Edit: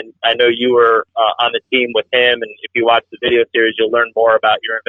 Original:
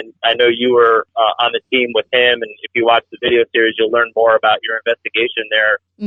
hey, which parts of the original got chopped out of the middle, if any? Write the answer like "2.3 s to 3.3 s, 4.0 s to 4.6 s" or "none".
none